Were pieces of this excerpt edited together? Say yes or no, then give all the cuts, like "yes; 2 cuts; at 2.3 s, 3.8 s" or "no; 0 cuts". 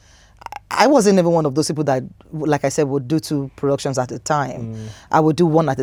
no; 0 cuts